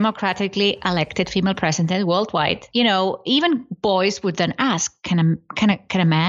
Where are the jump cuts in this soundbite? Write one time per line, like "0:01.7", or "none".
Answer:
0:02.6